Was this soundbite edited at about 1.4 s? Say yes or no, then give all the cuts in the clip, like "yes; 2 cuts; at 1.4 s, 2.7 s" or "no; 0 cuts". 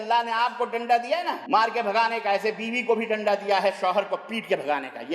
yes; 1 cut; at 1.4 s